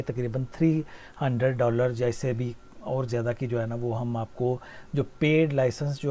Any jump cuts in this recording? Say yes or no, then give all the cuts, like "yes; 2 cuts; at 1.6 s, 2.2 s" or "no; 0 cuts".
no; 0 cuts